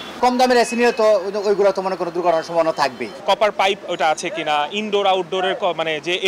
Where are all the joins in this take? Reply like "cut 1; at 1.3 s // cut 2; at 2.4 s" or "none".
cut 1; at 3.2 s